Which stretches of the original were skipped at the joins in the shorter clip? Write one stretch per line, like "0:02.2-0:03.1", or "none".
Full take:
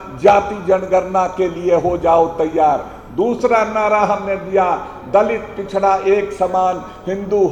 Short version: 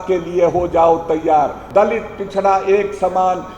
0:02.9-0:05.0

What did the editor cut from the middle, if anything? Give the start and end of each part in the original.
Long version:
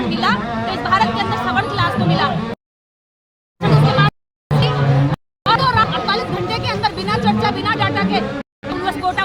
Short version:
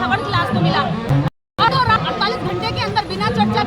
0:02.9-0:05.3

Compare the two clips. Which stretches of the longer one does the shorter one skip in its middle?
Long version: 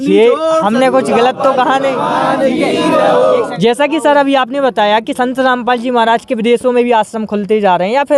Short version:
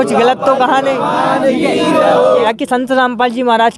0:03.5-0:05.0

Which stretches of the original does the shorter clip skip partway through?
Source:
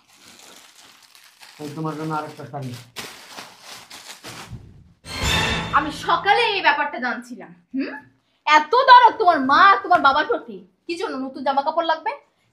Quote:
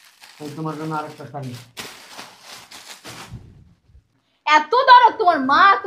0:05.1-0:08.0

